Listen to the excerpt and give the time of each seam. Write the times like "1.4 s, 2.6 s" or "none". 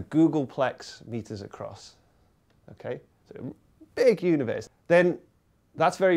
4.6 s